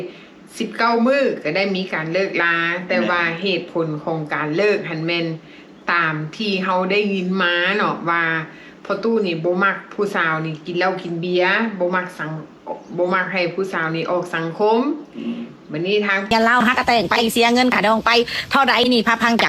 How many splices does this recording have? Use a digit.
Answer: 1